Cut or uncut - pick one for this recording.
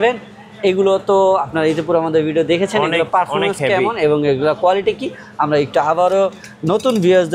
uncut